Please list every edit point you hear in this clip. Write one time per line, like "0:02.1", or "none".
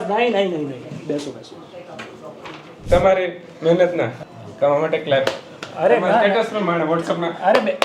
0:02.8